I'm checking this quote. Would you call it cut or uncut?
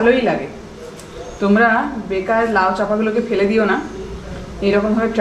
uncut